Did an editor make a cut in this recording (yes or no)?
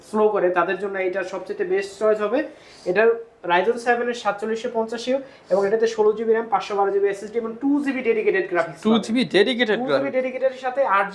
no